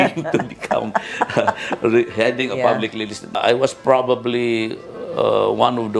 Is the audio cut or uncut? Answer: cut